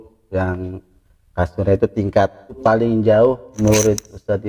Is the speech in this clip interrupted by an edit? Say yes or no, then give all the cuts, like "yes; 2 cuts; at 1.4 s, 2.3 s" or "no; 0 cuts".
yes; 2 cuts; at 2.6 s, 3.6 s